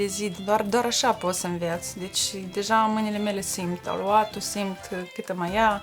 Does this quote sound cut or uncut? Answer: uncut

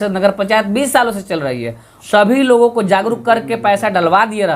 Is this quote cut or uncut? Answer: cut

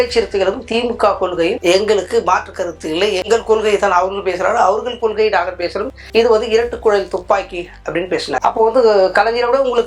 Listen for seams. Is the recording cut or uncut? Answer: cut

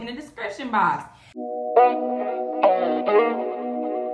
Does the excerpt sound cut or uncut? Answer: cut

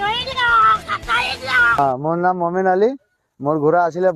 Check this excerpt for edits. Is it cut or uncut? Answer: cut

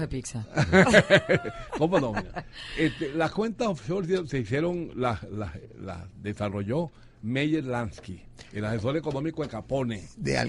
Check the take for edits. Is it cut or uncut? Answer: uncut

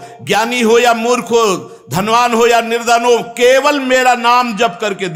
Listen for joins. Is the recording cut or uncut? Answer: uncut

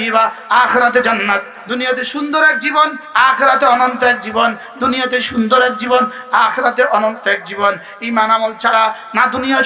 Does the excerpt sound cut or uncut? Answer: cut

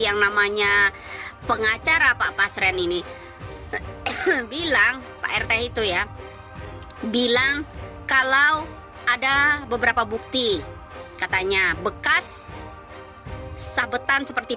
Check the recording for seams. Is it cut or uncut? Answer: cut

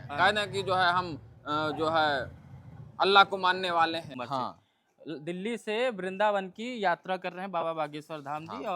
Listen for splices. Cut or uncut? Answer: cut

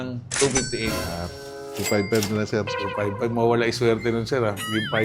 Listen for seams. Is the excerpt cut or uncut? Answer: uncut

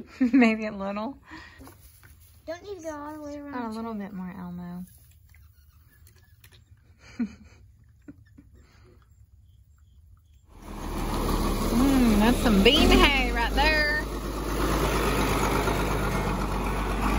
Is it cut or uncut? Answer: uncut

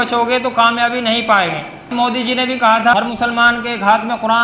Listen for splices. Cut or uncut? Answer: cut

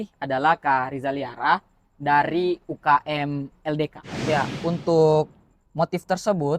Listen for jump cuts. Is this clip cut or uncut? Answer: cut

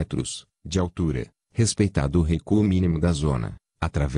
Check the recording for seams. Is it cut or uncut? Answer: cut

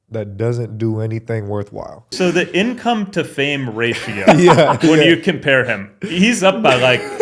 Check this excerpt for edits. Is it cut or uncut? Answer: cut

